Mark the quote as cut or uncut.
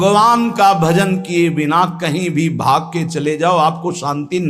uncut